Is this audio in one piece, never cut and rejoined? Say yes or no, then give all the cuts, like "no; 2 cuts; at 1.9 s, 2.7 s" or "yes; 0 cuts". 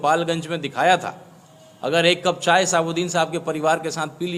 yes; 0 cuts